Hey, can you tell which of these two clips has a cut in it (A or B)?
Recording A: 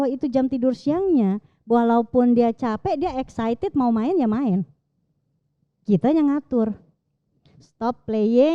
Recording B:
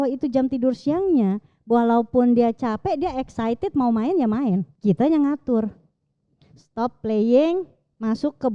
B